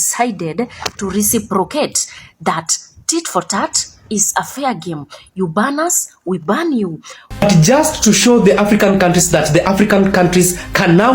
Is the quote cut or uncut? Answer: cut